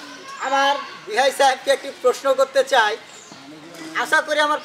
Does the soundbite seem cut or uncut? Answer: uncut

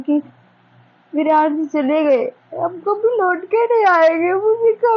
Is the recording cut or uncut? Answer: uncut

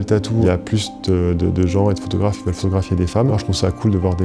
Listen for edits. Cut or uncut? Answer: uncut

